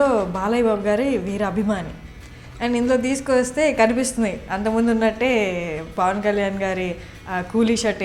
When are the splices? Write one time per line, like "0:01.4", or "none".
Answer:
none